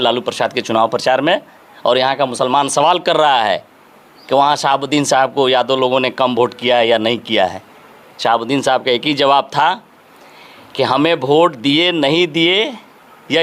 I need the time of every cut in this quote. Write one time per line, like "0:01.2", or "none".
none